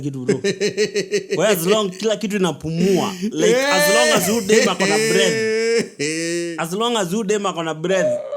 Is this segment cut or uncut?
uncut